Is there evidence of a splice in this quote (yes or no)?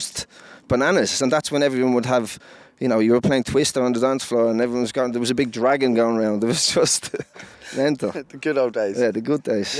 no